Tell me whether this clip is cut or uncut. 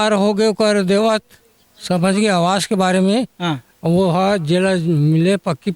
uncut